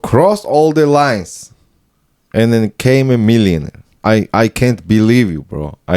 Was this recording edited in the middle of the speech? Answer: yes; 1 cut; at 4.0 s

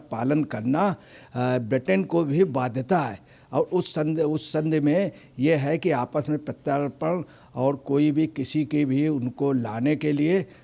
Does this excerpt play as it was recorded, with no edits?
yes; 0 cuts

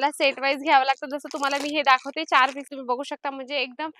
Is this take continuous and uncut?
no; 1 cut; at 2.7 s

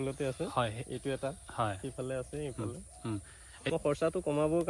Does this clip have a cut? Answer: yes; 1 cut; at 3.2 s

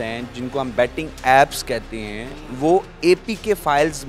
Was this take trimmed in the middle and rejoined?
no; 0 cuts

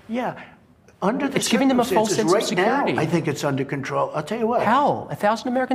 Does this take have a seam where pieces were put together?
yes; 1 cut; at 4.6 s

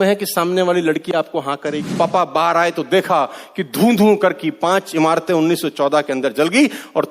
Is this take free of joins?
no; 1 cut; at 1.9 s

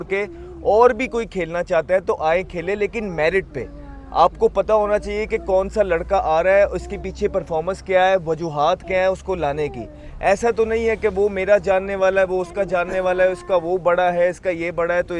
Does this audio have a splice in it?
no; 0 cuts

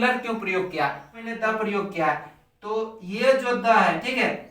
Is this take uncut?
no; 1 cut; at 1.3 s

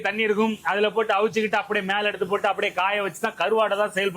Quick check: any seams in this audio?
no; 0 cuts

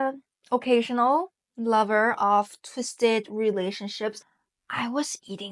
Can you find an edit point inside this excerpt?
yes; 1 cut; at 4.3 s

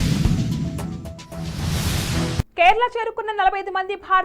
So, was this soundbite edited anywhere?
yes; 1 cut; at 2.5 s

